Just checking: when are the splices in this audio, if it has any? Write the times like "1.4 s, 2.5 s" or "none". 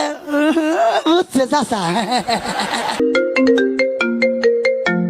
3.0 s